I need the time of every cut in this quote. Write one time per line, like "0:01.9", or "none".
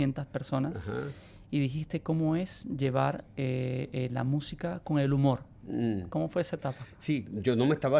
none